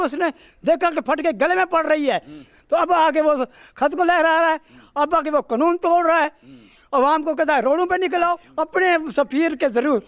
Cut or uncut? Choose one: cut